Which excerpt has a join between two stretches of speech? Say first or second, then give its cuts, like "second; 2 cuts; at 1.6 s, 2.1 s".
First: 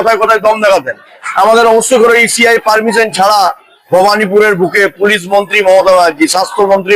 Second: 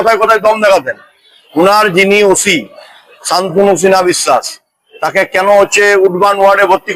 first; 1 cut; at 1.2 s